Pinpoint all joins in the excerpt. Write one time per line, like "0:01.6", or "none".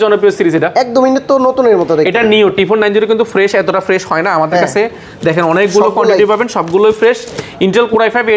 none